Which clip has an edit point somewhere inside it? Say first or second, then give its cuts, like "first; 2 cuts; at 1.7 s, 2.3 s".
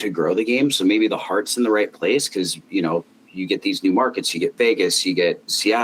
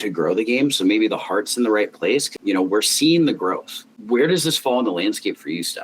second; 2 cuts; at 2.4 s, 3.9 s